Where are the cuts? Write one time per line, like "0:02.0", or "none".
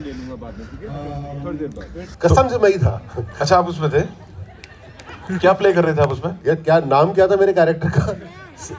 0:02.1
0:06.3